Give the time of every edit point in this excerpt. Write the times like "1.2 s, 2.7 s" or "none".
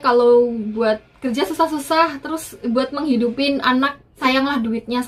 4.0 s